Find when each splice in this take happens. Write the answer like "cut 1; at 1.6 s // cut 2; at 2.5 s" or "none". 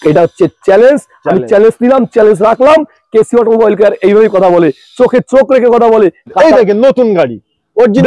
cut 1; at 6.3 s